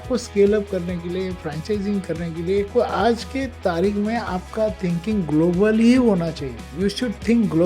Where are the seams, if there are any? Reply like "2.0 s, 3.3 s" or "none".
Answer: 2.7 s, 6.6 s